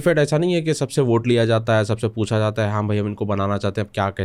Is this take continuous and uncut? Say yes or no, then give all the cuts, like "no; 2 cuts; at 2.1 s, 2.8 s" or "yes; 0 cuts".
yes; 0 cuts